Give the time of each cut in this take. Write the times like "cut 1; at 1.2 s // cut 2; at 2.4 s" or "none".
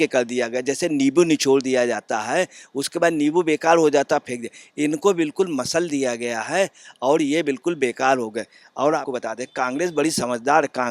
cut 1; at 9.0 s